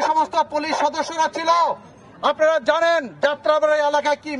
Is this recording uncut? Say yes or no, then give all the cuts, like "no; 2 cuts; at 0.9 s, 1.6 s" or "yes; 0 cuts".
yes; 0 cuts